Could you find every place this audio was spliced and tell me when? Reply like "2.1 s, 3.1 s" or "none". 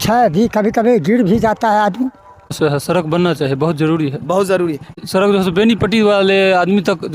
2.6 s, 5.0 s